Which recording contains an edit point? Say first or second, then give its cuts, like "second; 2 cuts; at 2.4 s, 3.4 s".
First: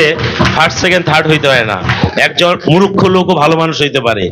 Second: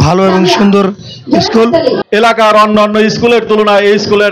second; 1 cut; at 2.0 s